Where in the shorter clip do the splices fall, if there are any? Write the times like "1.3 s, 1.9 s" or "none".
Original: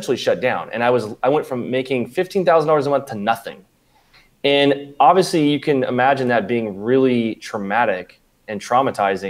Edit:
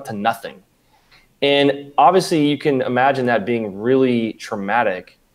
none